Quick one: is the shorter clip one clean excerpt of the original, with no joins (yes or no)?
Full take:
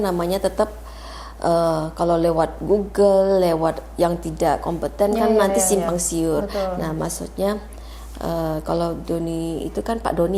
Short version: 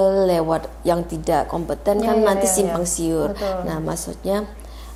yes